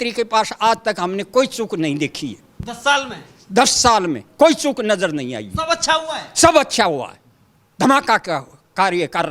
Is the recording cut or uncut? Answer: uncut